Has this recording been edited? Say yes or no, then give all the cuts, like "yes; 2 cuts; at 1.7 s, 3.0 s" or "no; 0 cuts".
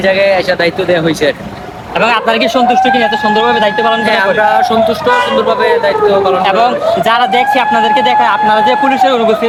no; 0 cuts